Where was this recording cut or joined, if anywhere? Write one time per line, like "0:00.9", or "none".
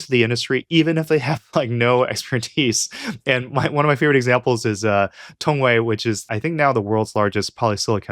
0:06.2